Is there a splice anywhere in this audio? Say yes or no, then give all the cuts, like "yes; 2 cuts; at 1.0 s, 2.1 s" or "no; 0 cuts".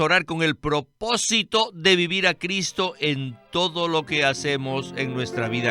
no; 0 cuts